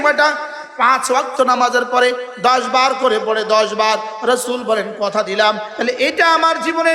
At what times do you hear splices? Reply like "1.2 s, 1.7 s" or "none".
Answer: 5.7 s